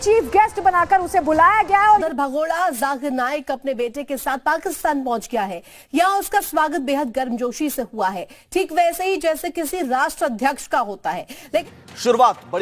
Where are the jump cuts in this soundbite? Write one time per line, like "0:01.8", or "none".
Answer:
0:02.1
0:11.6